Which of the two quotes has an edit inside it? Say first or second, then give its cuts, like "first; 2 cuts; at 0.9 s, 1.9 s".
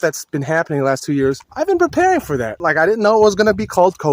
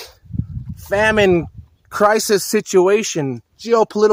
first; 2 cuts; at 1.5 s, 2.6 s